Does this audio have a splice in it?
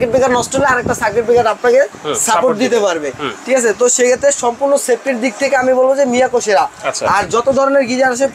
no; 0 cuts

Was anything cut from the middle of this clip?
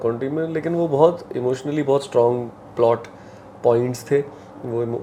no; 0 cuts

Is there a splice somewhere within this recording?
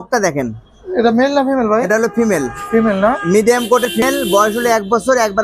no; 0 cuts

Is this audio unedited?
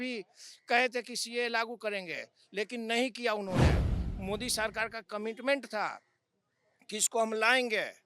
yes; 0 cuts

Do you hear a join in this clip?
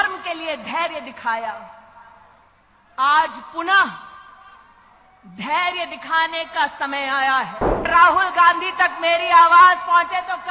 yes; 1 cut; at 7.9 s

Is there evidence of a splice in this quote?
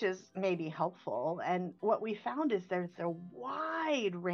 no; 0 cuts

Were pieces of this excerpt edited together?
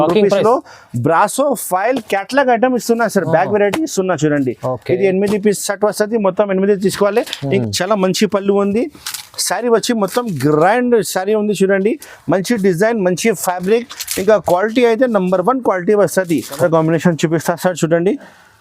yes; 2 cuts; at 7.6 s, 16.6 s

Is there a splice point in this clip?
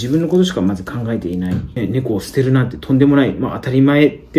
yes; 1 cut; at 1.7 s

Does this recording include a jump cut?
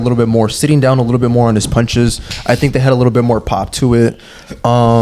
no; 0 cuts

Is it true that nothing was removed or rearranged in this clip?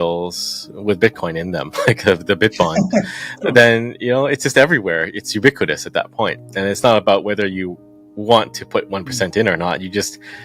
yes; 0 cuts

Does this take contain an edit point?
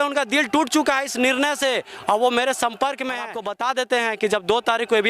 yes; 1 cut; at 3.4 s

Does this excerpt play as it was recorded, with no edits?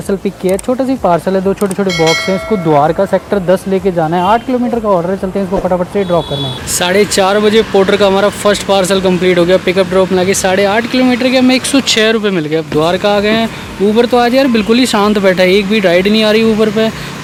yes; 0 cuts

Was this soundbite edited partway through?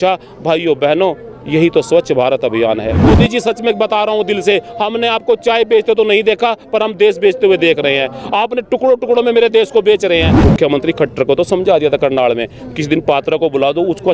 yes; 2 cuts; at 3.0 s, 10.3 s

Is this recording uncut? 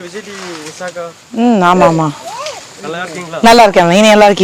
yes; 0 cuts

